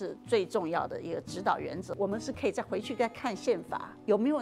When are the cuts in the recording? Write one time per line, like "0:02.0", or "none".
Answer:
0:01.9